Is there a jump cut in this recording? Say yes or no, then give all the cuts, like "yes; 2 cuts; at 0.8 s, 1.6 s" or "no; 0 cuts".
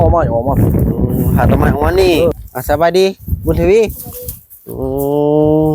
yes; 1 cut; at 2.3 s